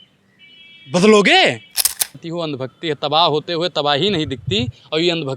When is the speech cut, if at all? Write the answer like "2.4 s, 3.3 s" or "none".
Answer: 2.3 s